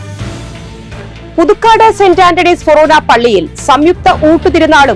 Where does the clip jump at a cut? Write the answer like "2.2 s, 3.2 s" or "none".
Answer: 1.0 s